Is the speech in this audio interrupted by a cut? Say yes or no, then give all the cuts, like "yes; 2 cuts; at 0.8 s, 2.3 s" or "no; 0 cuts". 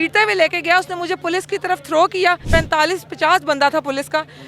yes; 1 cut; at 2.4 s